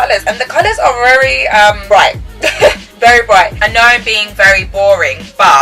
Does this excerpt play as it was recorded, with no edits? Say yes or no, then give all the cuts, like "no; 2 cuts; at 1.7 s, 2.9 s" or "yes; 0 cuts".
no; 1 cut; at 3.6 s